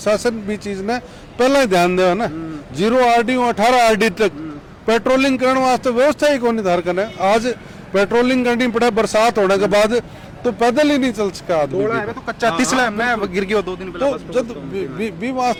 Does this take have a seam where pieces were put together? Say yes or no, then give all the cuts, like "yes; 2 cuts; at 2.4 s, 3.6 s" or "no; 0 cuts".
no; 0 cuts